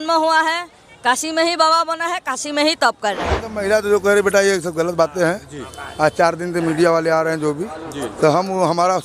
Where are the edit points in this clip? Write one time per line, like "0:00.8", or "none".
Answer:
0:03.3